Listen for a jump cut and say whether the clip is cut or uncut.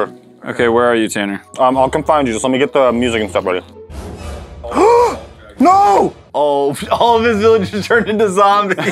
cut